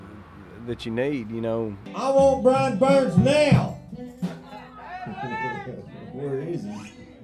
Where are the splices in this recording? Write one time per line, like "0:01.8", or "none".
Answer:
0:01.8